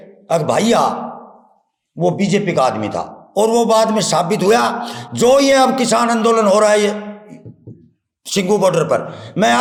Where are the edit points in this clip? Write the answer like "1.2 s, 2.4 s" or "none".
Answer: none